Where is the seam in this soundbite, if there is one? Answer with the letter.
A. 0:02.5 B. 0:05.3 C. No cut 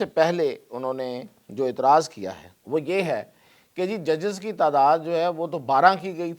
A